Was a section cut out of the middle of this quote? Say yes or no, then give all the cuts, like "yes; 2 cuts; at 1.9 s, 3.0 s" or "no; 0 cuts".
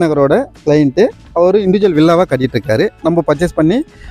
no; 0 cuts